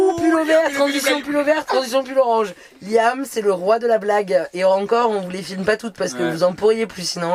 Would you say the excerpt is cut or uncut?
uncut